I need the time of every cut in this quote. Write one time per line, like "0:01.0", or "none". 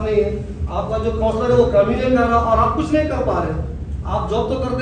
none